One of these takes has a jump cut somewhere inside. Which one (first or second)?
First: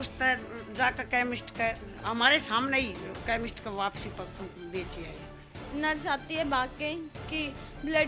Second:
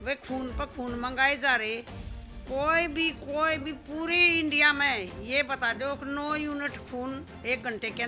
first